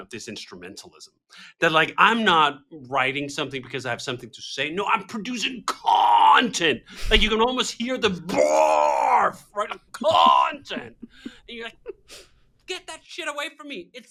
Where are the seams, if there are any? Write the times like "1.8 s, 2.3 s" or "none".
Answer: none